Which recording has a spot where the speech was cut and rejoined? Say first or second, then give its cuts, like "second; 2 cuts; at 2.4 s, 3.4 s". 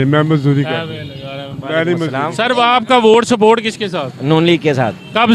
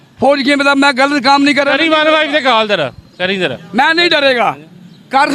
first; 1 cut; at 2.2 s